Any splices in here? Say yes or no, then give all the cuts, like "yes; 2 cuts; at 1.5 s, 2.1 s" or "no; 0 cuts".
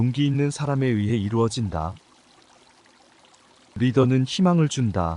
no; 0 cuts